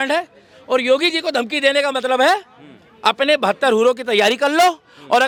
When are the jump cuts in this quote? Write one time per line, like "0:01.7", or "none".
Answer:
none